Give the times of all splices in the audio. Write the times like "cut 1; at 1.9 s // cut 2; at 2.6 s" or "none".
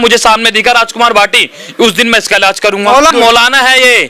cut 1; at 3.1 s